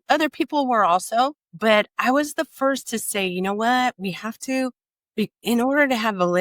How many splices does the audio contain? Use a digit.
1